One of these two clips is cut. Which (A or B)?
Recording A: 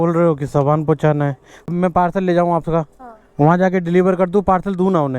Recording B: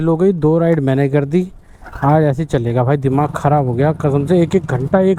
A